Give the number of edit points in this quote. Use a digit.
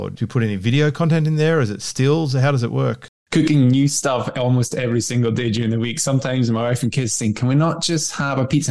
1